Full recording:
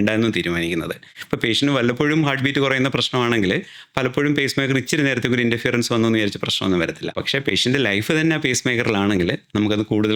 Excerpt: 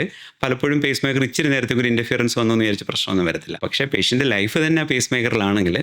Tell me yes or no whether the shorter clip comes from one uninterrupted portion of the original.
yes